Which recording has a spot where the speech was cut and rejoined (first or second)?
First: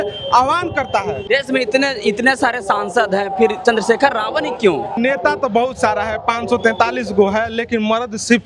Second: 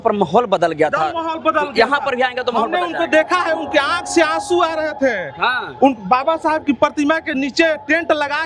first